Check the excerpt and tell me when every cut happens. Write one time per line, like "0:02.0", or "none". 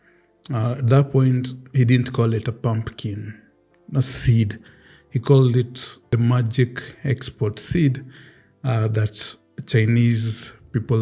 0:06.1